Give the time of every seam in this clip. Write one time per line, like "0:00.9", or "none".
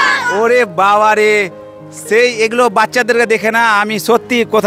none